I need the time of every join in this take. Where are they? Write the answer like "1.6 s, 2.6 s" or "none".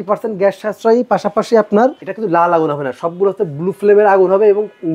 2.1 s